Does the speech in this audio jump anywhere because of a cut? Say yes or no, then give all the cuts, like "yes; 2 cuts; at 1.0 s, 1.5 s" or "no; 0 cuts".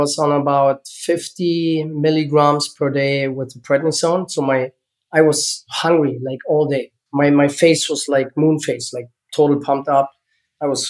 no; 0 cuts